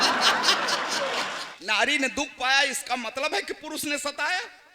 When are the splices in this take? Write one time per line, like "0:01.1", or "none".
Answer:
0:01.5

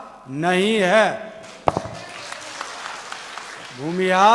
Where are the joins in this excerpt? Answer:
none

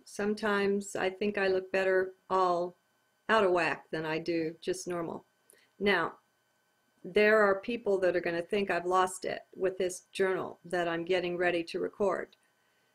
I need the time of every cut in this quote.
0:05.7

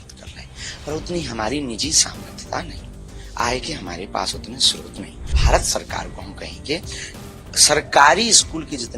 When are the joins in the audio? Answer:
0:05.4

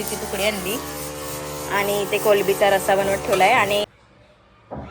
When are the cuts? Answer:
0:03.8

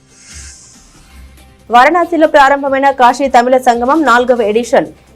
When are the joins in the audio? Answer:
0:01.7

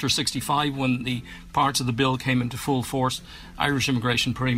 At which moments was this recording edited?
0:01.0

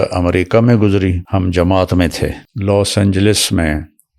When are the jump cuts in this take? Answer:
0:01.2
0:02.5

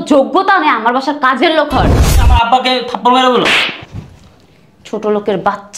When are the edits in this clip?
0:02.0

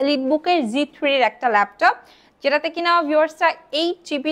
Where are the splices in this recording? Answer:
none

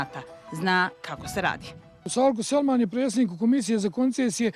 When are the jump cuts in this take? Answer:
0:03.2

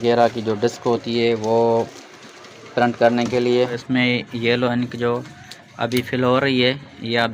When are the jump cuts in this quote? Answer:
0:03.6

